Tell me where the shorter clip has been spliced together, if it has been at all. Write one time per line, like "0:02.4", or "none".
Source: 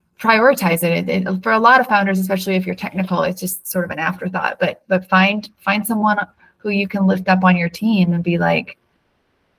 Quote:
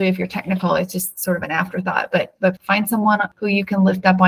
0:02.6
0:03.3